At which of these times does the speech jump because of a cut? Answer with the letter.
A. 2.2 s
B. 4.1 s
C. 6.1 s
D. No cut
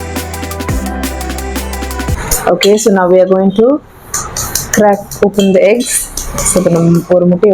A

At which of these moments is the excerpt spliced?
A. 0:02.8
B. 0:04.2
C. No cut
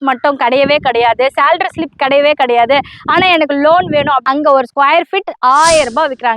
B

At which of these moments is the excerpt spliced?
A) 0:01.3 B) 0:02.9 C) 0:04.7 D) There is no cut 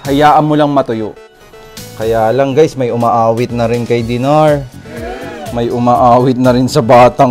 A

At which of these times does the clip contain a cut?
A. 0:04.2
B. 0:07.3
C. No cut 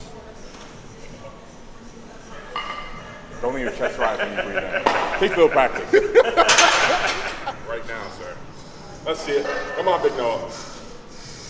B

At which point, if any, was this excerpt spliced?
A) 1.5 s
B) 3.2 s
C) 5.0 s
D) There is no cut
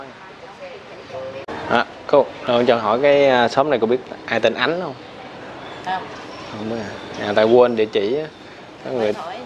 A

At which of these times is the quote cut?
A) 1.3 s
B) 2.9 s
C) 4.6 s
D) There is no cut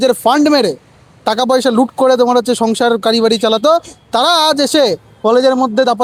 D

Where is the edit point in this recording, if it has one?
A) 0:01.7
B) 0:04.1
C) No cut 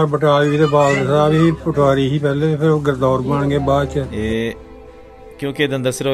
B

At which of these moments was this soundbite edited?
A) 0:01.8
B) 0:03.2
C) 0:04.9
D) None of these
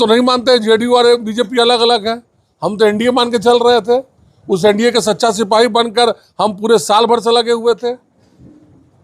D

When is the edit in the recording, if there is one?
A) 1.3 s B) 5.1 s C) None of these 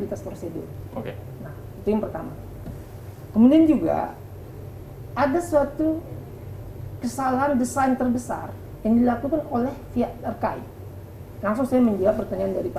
C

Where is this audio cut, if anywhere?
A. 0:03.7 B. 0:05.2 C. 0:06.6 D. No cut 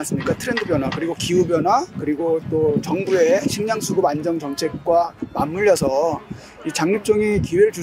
D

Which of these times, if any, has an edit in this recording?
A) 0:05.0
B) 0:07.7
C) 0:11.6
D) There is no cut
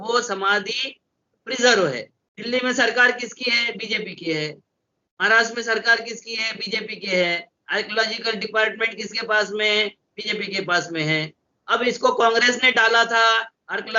D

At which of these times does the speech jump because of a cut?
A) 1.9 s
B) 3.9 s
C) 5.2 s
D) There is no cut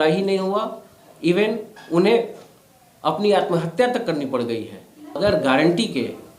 C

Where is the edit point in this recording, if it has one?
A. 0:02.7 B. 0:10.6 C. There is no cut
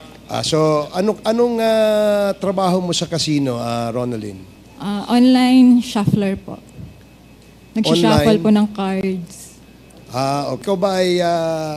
B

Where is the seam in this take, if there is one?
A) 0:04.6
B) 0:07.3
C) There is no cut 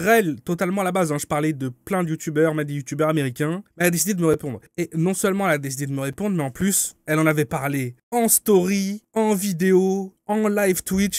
C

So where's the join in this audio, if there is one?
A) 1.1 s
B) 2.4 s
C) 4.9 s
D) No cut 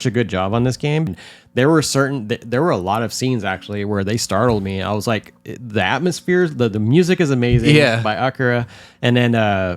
A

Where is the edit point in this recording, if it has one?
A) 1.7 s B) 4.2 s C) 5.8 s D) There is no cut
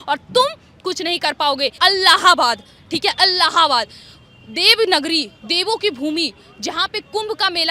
A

